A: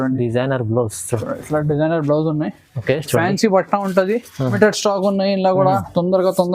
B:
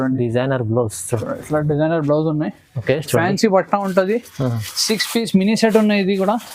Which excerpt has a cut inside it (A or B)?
A